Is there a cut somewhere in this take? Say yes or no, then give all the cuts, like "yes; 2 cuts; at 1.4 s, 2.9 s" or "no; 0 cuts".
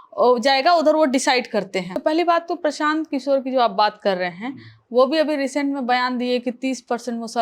yes; 1 cut; at 1.9 s